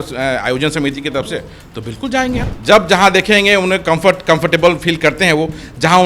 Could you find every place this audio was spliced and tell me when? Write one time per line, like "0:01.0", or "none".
0:02.5